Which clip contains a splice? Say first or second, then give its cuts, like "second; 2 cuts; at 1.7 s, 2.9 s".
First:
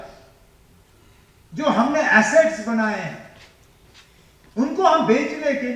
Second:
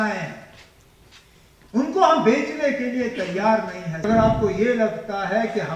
second; 1 cut; at 4.0 s